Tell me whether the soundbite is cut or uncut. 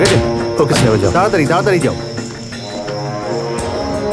uncut